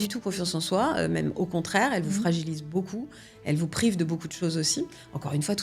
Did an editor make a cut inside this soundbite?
no; 0 cuts

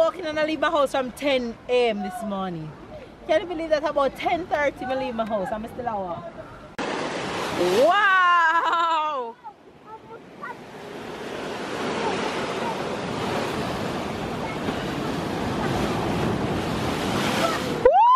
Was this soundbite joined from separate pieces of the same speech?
yes; 1 cut; at 6.8 s

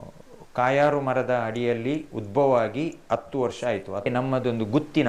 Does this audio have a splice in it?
yes; 1 cut; at 4.1 s

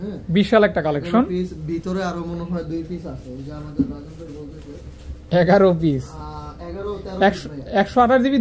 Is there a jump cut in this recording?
no; 0 cuts

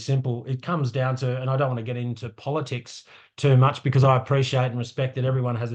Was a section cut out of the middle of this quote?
no; 0 cuts

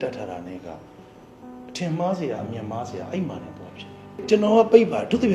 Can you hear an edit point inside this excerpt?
yes; 1 cut; at 4.2 s

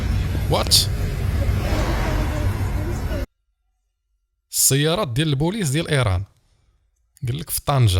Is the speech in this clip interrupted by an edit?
no; 0 cuts

